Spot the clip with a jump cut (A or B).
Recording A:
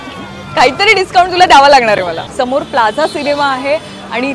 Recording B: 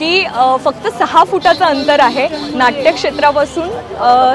A